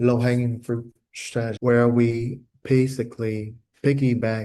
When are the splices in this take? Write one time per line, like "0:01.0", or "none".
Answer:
none